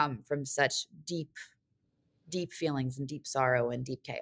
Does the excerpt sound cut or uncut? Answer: uncut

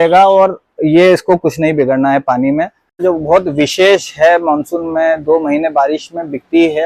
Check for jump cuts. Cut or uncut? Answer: cut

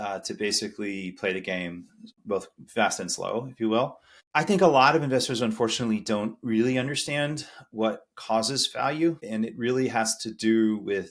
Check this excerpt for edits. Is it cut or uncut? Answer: cut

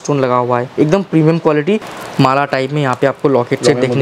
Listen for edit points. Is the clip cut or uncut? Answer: cut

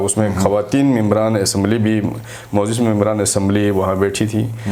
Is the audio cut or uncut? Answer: uncut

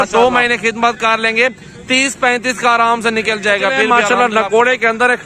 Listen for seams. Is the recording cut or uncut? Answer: cut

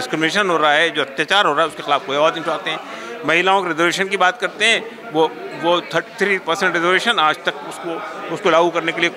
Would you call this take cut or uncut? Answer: uncut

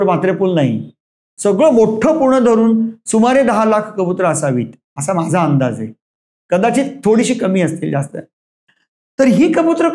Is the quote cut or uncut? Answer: uncut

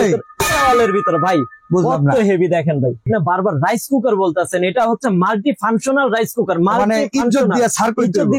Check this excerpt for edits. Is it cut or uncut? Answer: cut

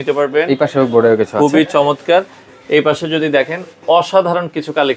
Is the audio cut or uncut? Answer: uncut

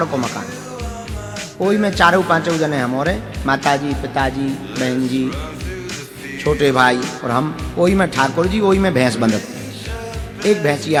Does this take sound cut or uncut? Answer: uncut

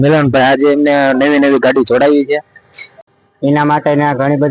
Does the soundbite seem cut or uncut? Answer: cut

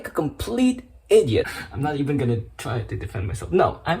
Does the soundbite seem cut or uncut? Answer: cut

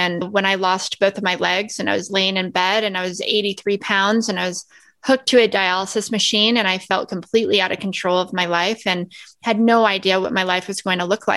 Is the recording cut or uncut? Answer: uncut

